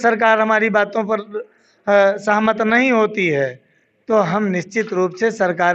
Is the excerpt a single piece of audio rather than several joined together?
yes; 0 cuts

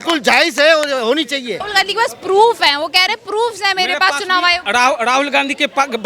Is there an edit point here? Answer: yes; 1 cut; at 1.7 s

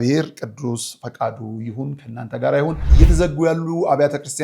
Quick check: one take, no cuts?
no; 1 cut; at 2.9 s

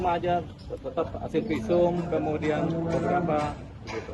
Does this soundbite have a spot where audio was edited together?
no; 0 cuts

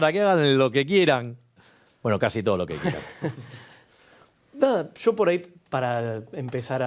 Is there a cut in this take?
no; 0 cuts

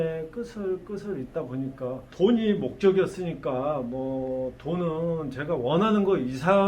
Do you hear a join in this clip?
yes; 1 cut; at 2.1 s

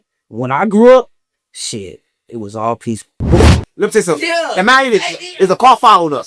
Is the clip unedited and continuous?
no; 1 cut; at 3.4 s

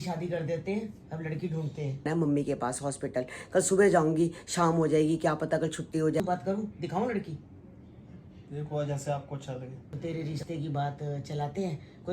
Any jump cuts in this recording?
yes; 3 cuts; at 2.1 s, 6.2 s, 9.8 s

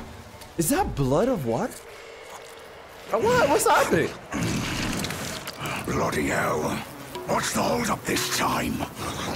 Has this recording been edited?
yes; 1 cut; at 3.1 s

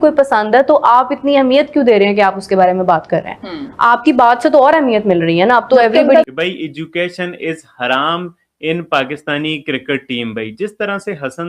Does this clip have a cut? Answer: yes; 1 cut; at 6.3 s

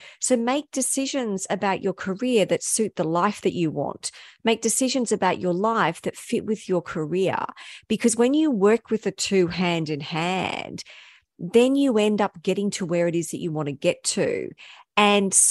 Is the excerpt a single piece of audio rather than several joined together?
yes; 0 cuts

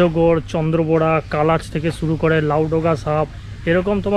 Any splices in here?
no; 0 cuts

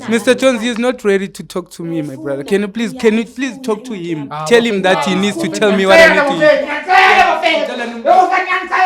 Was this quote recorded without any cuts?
yes; 0 cuts

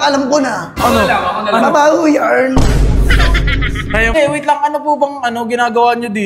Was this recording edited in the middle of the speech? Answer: yes; 1 cut; at 4.2 s

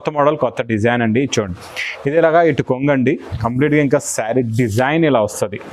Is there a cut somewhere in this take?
no; 0 cuts

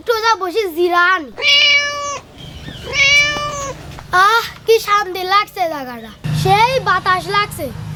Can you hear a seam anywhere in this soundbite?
no; 0 cuts

